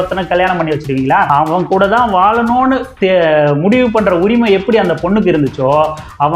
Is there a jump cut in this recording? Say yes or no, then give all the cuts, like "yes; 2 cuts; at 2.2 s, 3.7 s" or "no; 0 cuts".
yes; 1 cut; at 1.3 s